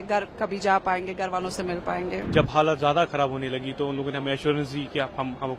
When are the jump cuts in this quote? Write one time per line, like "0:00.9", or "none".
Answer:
0:02.2